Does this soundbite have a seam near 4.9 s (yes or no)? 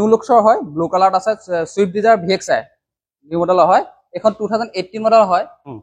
no